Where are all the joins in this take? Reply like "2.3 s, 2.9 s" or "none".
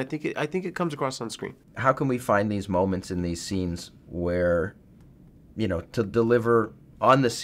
1.4 s

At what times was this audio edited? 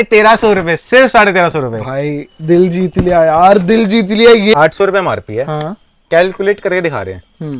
4.5 s

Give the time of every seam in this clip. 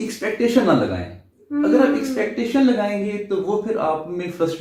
none

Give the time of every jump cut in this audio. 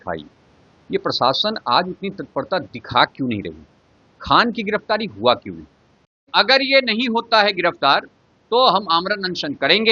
6.3 s

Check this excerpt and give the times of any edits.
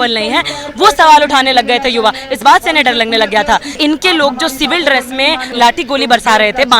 3.7 s, 5.5 s

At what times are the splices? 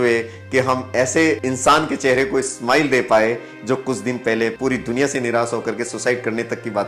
1.4 s, 4.6 s

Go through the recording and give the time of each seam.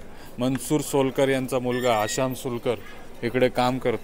none

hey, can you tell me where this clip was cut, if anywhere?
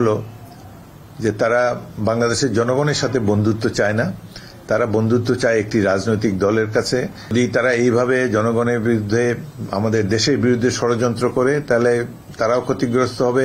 7.3 s

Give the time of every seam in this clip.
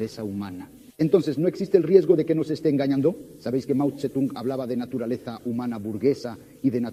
none

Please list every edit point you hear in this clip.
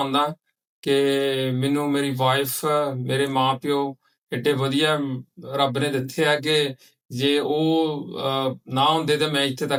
none

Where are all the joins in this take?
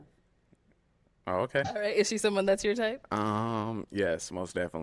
1.6 s

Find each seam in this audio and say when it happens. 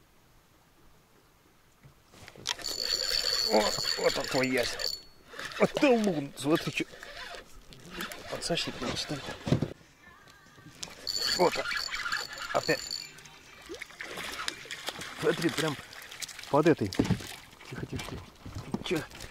9.7 s

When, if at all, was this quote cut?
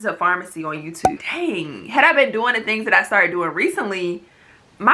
1.2 s

